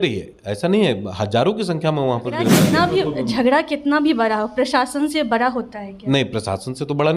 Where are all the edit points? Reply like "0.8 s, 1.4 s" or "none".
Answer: 2.5 s